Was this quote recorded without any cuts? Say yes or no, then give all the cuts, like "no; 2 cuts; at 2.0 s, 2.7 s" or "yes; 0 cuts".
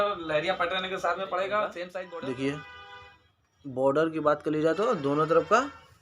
no; 1 cut; at 1.9 s